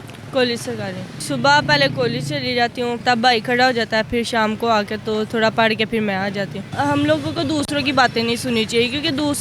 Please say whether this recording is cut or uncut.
cut